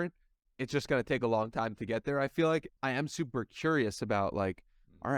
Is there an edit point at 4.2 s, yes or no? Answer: no